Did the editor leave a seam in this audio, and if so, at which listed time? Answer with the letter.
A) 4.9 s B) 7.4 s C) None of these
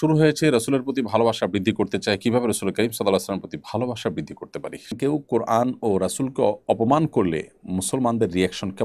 A